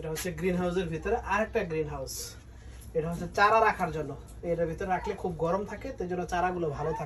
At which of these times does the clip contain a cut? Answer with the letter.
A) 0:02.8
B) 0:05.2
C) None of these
C